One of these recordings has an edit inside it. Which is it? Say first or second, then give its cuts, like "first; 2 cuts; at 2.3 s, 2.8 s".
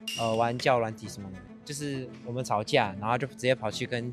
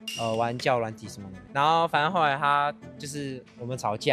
first; 1 cut; at 1.5 s